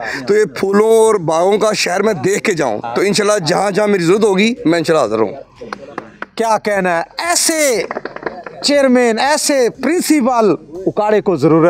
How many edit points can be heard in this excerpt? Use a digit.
0